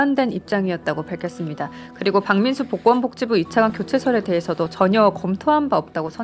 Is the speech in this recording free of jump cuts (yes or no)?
yes